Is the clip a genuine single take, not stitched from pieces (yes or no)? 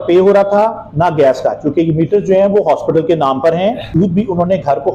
no